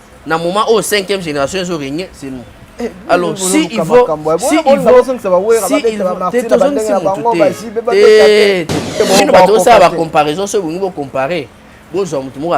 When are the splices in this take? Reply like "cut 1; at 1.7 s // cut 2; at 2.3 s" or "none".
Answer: cut 1; at 9.0 s